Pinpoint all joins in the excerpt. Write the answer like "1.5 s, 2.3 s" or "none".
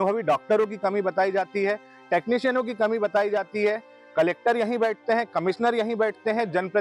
none